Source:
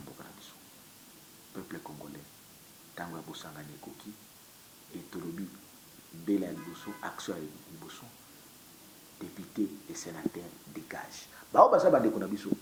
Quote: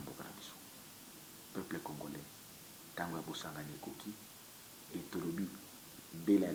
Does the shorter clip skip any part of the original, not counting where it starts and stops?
no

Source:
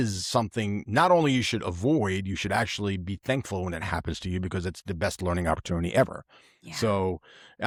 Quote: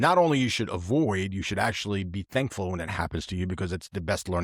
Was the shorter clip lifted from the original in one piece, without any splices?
yes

